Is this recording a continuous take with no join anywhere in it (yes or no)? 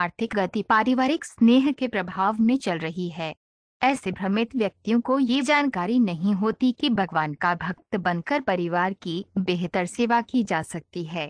yes